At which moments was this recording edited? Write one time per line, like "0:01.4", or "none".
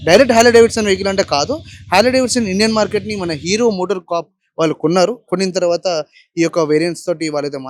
none